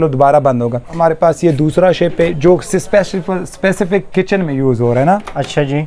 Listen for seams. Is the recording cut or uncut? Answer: cut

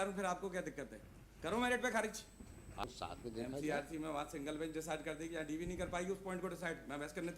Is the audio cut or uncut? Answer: cut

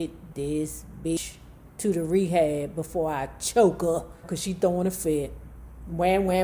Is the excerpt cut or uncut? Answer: cut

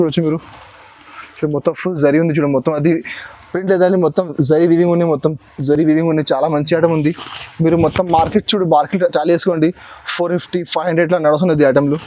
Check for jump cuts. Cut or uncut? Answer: uncut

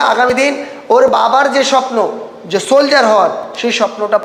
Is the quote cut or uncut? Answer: uncut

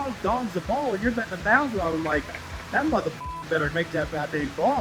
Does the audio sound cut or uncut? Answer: uncut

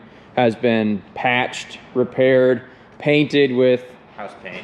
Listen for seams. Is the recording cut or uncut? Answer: uncut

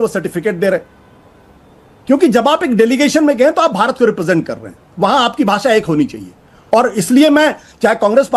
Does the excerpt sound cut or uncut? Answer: uncut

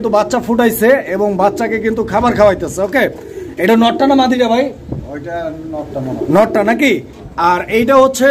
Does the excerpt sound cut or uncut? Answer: uncut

